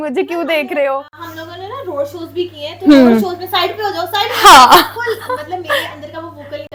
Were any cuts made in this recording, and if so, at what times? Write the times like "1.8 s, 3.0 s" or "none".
none